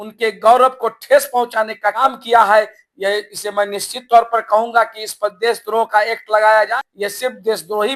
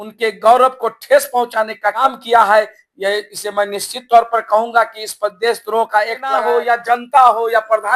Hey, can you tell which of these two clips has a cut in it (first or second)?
second